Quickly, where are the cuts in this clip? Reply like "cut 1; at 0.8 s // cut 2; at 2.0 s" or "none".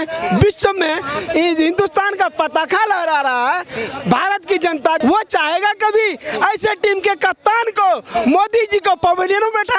cut 1; at 5.0 s